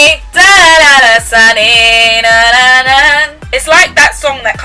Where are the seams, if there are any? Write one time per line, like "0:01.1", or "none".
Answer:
none

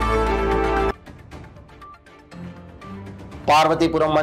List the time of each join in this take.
0:00.9

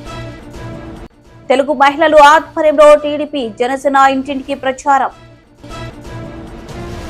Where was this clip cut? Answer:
0:01.0

